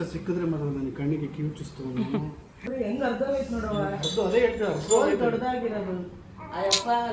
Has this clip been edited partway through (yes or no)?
yes